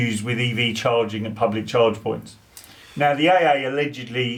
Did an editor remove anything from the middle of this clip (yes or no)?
no